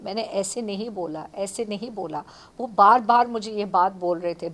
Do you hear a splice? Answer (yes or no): no